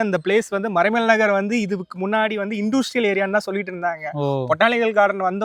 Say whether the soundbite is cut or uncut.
uncut